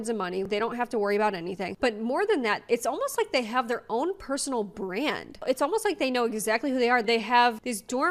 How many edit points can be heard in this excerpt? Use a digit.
0